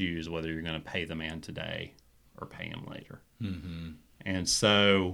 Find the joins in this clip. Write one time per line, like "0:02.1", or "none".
none